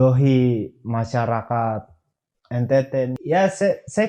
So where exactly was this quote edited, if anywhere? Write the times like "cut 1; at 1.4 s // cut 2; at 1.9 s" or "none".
cut 1; at 3.2 s